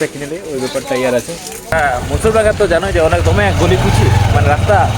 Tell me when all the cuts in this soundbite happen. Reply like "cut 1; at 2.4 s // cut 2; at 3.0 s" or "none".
cut 1; at 1.7 s